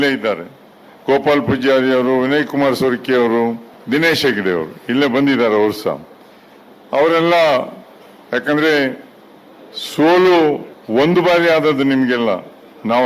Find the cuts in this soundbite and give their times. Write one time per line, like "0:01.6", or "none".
0:03.7
0:10.7